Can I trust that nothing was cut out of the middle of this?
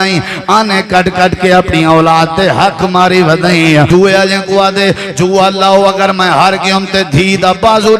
no; 1 cut; at 3.9 s

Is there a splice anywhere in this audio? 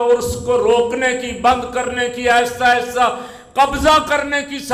no; 0 cuts

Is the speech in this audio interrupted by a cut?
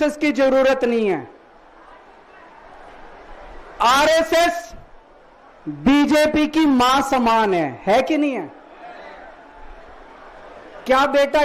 no; 0 cuts

